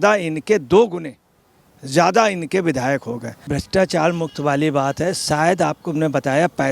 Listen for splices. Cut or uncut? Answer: cut